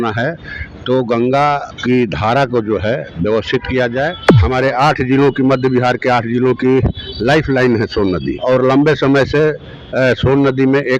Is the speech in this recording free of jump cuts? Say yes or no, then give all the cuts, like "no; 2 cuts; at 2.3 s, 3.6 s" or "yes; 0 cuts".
no; 3 cuts; at 1.7 s, 4.3 s, 8.3 s